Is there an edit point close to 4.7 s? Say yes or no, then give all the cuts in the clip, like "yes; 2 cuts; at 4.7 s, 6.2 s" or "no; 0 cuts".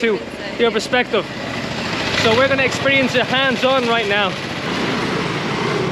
yes; 1 cut; at 4.7 s